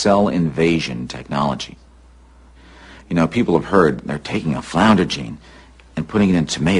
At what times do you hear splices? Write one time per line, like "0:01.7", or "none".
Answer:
none